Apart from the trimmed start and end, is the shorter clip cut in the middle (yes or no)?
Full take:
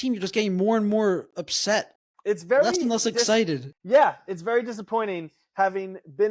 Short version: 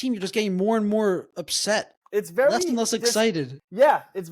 yes